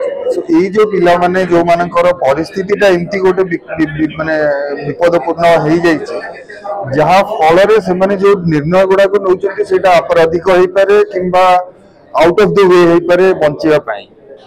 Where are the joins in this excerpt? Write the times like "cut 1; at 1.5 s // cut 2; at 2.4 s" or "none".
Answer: none